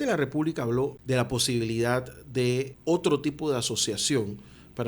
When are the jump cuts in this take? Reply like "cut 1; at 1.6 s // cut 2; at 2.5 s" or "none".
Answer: cut 1; at 1.0 s // cut 2; at 2.7 s